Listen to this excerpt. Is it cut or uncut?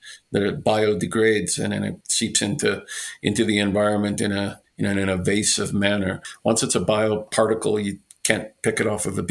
uncut